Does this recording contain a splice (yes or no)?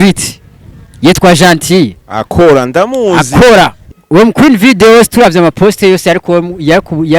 yes